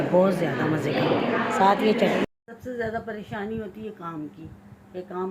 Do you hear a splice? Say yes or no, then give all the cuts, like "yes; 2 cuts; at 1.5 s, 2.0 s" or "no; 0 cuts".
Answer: yes; 1 cut; at 2.2 s